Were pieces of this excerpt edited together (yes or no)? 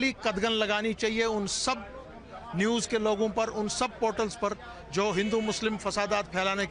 no